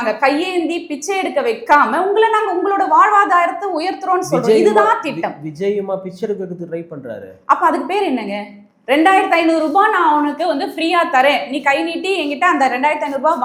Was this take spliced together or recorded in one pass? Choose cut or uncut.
uncut